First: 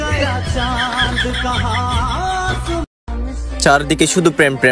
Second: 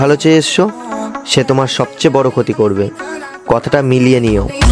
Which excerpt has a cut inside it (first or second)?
first